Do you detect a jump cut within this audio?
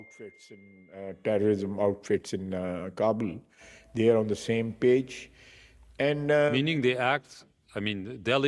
no; 0 cuts

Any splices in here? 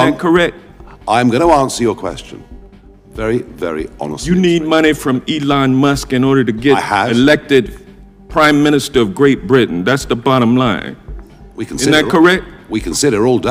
no; 0 cuts

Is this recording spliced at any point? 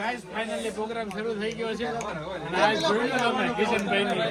no; 0 cuts

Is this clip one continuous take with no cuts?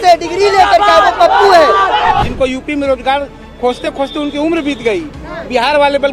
no; 1 cut; at 2.2 s

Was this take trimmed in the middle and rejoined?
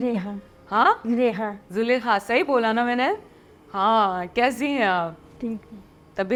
no; 0 cuts

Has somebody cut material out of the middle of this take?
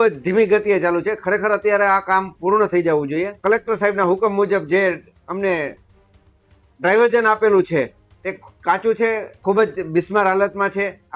yes; 2 cuts; at 3.3 s, 9.3 s

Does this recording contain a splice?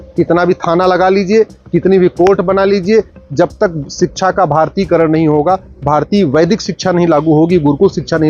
no; 0 cuts

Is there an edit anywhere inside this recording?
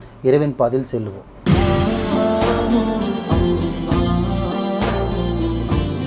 yes; 1 cut; at 1.4 s

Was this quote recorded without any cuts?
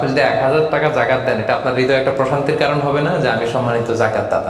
yes; 0 cuts

